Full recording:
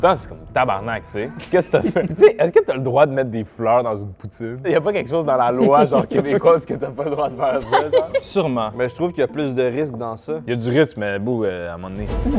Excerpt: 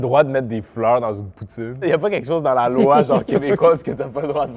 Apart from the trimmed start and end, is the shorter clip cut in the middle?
no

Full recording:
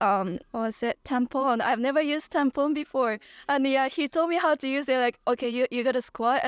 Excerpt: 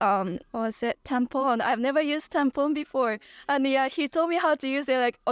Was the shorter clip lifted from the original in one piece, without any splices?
yes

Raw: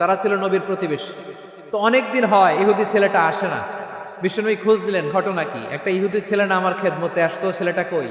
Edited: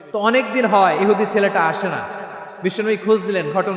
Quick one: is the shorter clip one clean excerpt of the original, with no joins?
yes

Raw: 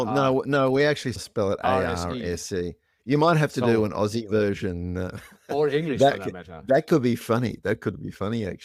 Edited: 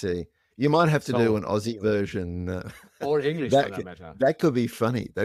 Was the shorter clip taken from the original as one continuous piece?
yes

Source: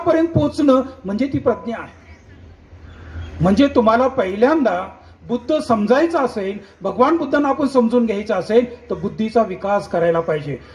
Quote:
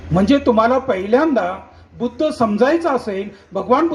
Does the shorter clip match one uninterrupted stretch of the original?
yes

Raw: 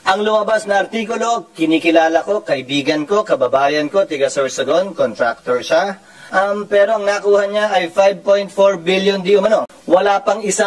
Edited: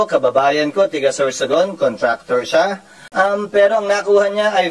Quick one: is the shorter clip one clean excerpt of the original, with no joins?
yes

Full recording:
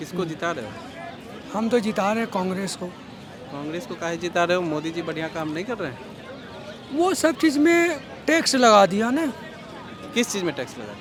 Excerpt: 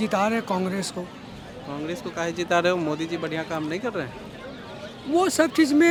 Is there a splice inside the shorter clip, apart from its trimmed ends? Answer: no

